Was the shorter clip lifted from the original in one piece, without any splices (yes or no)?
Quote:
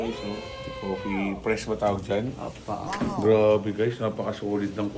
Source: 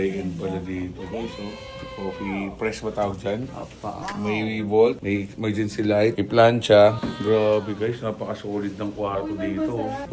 no